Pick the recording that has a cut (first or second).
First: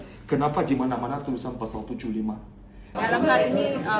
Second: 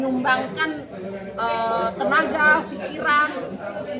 first